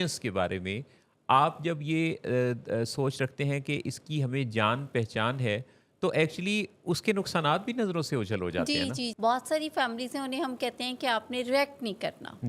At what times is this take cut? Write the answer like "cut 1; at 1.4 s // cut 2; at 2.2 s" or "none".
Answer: cut 1; at 9.1 s

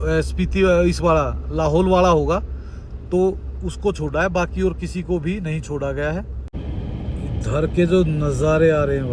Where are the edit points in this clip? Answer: cut 1; at 6.6 s

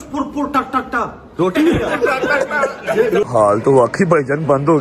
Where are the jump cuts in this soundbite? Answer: cut 1; at 3.3 s

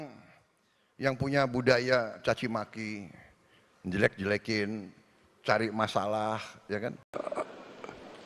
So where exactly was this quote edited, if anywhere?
cut 1; at 7.0 s

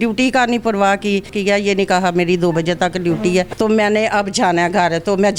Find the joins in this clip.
cut 1; at 1.3 s // cut 2; at 3.5 s

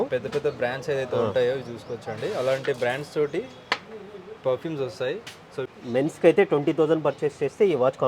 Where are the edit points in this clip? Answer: cut 1; at 5.7 s

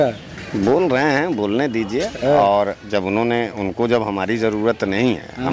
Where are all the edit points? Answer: none

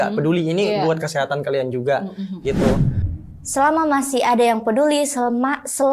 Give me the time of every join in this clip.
cut 1; at 3.0 s

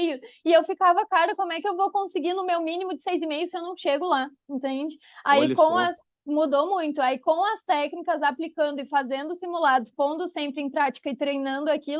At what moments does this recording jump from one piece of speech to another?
none

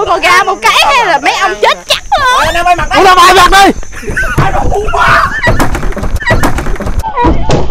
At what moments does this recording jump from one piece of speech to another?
cut 1; at 2.3 s

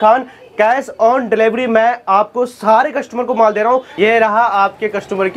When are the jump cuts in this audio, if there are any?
cut 1; at 3.9 s

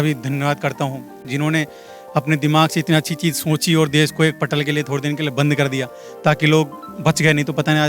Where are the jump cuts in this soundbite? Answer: none

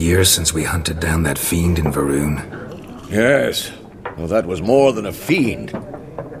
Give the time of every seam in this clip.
none

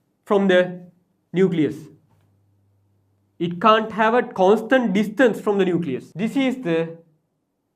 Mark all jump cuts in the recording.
cut 1; at 6.1 s

